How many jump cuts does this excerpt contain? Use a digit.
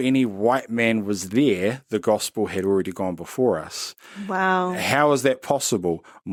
0